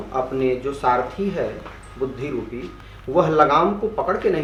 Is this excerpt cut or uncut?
uncut